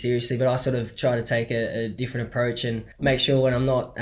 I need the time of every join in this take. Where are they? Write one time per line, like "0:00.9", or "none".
0:02.9

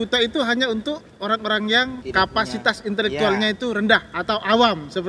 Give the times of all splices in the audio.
0:02.0

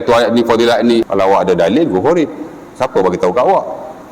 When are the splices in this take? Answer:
0:01.0

